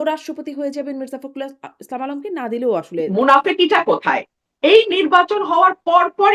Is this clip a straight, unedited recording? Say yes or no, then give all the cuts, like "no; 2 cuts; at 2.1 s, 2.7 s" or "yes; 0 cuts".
no; 1 cut; at 3.1 s